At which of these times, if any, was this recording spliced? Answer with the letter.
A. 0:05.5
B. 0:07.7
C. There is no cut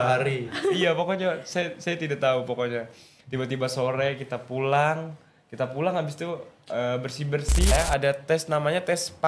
B